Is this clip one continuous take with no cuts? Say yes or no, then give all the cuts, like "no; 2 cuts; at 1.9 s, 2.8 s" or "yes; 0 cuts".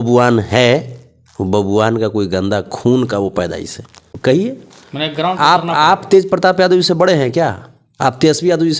no; 1 cut; at 4.1 s